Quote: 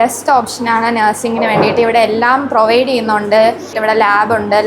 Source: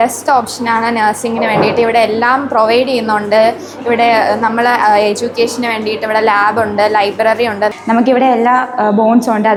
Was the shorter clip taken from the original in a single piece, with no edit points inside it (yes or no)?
no